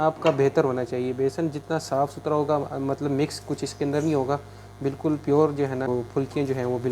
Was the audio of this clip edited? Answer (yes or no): yes